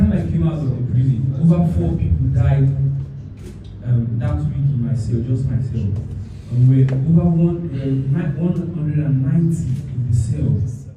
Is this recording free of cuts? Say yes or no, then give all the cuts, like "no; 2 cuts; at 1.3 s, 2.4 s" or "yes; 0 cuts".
yes; 0 cuts